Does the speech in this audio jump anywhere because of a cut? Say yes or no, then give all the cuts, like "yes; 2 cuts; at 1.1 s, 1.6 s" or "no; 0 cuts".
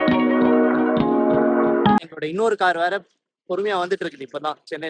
yes; 1 cut; at 2.0 s